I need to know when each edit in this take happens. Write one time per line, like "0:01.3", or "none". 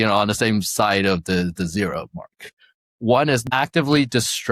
0:03.4